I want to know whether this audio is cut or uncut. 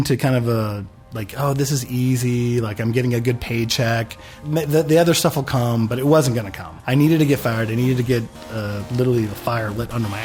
uncut